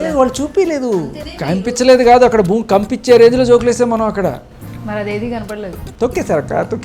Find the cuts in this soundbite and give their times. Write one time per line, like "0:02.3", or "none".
0:01.1
0:05.8